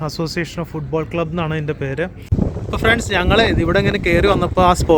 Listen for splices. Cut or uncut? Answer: cut